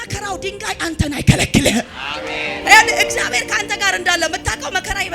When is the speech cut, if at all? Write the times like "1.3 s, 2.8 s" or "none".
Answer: 2.6 s